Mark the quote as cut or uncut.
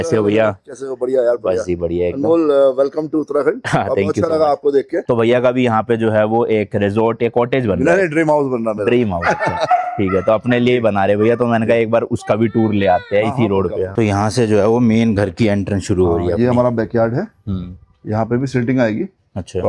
cut